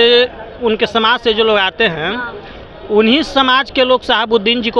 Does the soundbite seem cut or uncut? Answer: uncut